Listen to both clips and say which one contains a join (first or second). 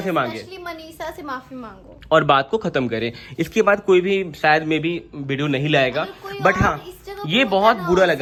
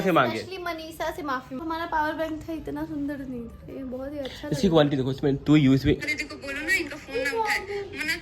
second